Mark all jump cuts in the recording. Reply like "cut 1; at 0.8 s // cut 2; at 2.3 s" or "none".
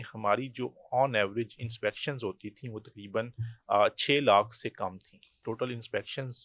cut 1; at 5.4 s